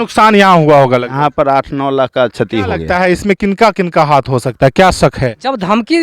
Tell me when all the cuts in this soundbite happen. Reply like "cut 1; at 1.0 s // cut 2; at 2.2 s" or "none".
cut 1; at 2.8 s